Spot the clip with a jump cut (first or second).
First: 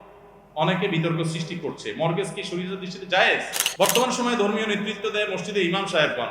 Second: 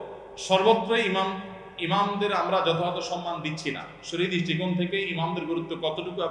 first